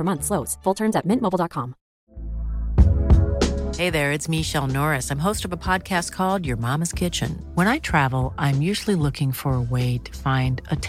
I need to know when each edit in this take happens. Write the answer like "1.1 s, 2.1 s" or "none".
2.0 s

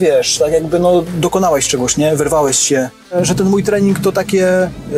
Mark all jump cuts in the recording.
3.1 s

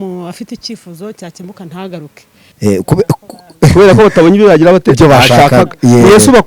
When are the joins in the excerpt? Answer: 2.4 s

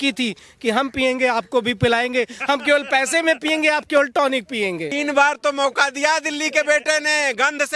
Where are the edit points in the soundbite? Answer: 4.9 s

